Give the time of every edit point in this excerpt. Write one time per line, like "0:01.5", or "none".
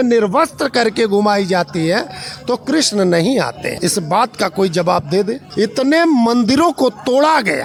none